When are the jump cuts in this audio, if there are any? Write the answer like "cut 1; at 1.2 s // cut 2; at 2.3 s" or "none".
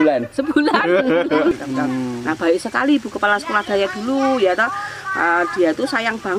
cut 1; at 1.5 s